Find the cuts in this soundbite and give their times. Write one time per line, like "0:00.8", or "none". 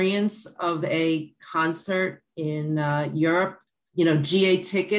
0:03.6